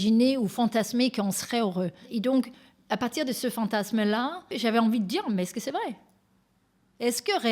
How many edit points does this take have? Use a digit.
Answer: 2